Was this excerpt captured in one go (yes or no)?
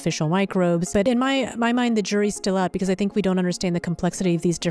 no